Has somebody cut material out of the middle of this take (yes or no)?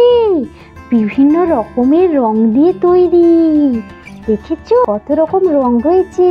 yes